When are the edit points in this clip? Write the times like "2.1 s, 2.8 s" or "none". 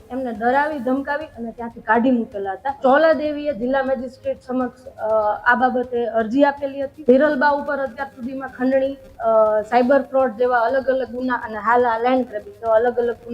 2.8 s, 6.9 s